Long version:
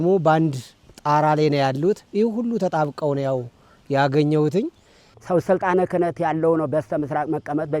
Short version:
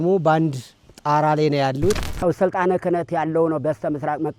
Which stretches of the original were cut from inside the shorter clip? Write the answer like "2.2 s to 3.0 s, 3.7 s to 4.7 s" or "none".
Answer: 2.1 s to 5.1 s